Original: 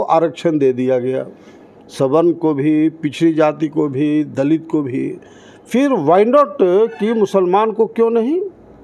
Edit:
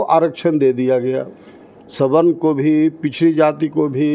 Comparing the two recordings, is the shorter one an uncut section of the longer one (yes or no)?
yes